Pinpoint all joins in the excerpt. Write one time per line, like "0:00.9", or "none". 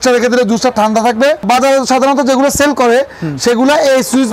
0:01.4

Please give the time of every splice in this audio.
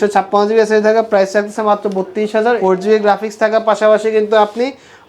0:02.6

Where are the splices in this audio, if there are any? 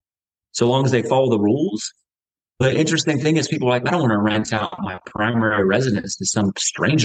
none

